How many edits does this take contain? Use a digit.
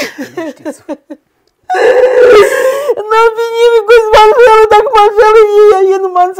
0